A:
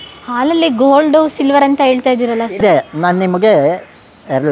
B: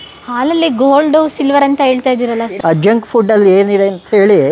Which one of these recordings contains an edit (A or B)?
B